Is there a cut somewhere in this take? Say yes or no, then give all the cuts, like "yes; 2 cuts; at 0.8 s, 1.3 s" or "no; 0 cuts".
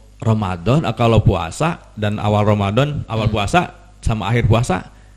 no; 0 cuts